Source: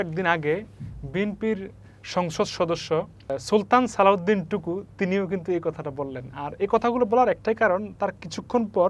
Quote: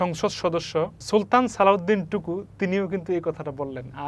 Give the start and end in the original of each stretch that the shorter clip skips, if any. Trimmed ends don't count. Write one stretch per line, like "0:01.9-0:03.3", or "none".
0:03.2-0:03.4